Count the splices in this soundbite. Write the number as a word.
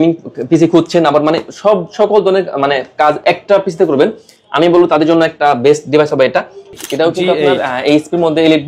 one